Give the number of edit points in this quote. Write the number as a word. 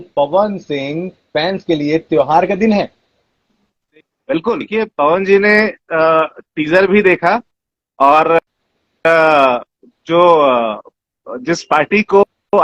one